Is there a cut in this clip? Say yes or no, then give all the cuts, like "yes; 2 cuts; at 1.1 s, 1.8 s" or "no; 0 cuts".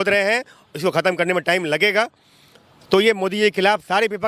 no; 0 cuts